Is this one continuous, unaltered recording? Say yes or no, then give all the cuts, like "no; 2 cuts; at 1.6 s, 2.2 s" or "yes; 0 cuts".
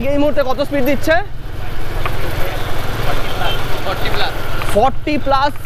yes; 0 cuts